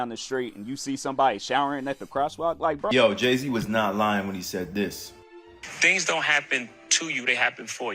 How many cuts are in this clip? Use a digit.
1